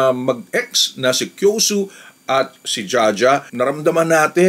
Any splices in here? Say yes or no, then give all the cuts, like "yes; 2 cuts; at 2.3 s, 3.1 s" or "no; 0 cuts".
yes; 1 cut; at 3.5 s